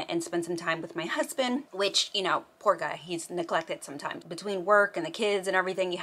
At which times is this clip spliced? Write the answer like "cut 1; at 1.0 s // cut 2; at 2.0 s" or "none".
cut 1; at 4.2 s